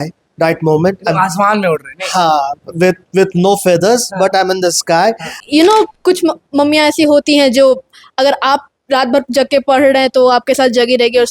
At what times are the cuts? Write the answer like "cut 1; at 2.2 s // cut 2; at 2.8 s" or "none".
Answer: cut 1; at 5.3 s